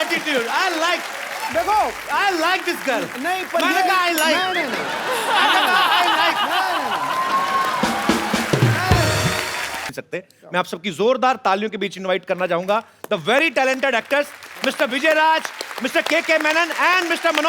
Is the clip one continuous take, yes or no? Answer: no